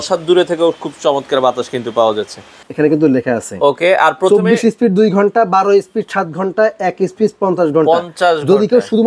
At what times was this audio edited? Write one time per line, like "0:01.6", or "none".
0:02.6

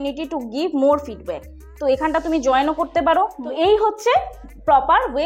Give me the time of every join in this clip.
0:03.4

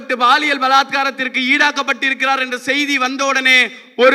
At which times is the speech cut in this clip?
none

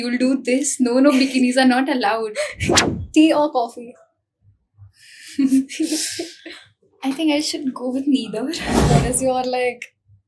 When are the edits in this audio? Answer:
0:02.8
0:08.7

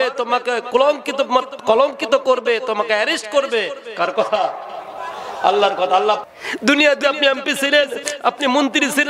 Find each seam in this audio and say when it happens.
0:06.2

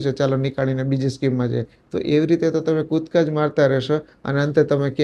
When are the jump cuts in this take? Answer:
none

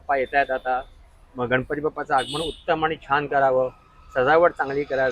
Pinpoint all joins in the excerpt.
none

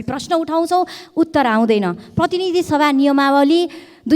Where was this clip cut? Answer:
none

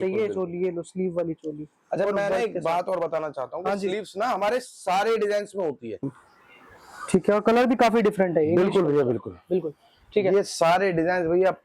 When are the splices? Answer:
0:06.0

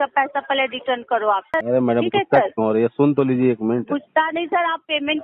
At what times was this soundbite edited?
0:01.5

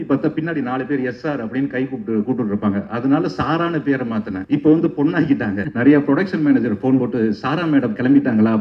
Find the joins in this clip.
0:04.4
0:05.7

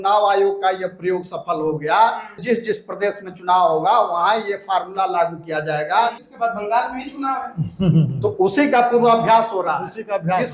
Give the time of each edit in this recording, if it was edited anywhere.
0:02.4
0:06.3

